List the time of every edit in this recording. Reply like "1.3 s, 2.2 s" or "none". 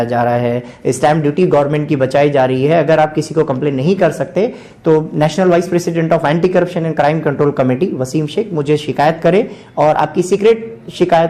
none